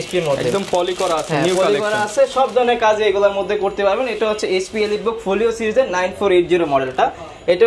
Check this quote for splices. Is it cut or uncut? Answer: uncut